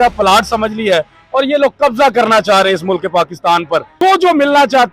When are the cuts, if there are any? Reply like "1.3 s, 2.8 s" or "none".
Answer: 3.9 s